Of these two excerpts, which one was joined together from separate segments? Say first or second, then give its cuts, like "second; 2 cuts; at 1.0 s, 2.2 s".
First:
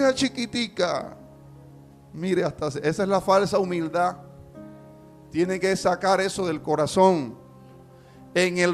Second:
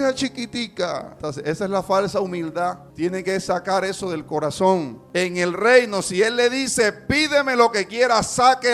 second; 3 cuts; at 1.2 s, 2.9 s, 5.0 s